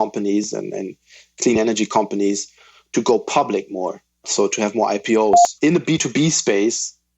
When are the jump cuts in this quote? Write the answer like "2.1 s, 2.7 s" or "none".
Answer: 4.3 s, 5.5 s